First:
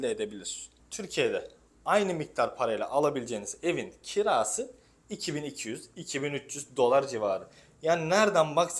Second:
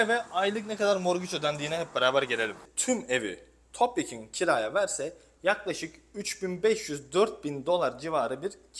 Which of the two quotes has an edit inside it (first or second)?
second